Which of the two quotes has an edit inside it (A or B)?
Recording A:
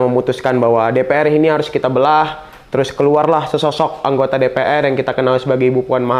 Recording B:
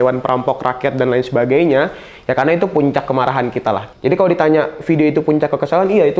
B